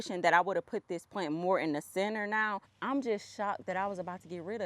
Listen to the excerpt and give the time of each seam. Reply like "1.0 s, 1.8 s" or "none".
2.7 s